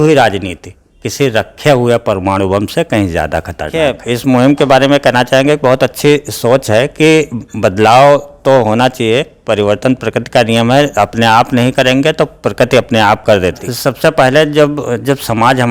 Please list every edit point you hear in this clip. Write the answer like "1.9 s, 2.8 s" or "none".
3.7 s, 13.6 s